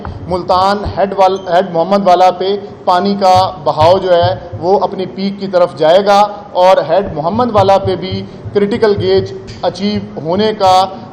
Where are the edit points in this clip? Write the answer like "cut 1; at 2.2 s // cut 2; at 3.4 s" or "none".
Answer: none